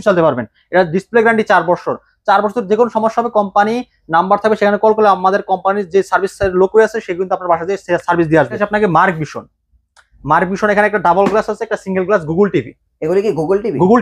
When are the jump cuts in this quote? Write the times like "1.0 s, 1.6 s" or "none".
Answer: 8.6 s